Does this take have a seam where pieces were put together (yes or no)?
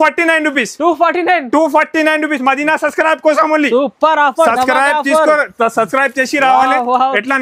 no